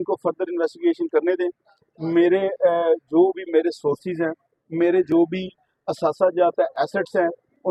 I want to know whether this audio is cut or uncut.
uncut